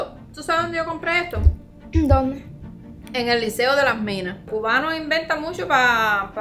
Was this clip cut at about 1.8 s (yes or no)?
no